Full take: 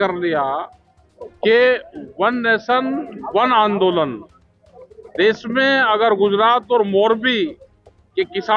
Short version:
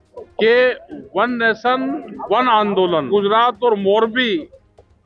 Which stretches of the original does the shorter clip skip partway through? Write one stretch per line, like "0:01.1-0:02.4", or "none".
0:04.1-0:06.2